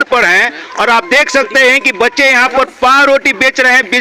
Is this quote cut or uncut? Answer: uncut